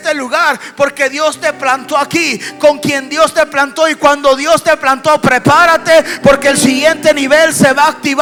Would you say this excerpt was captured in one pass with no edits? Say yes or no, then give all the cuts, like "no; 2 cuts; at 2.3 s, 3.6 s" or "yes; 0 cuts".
yes; 0 cuts